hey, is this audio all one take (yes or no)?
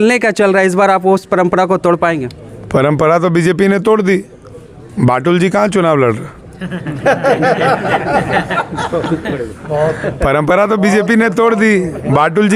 yes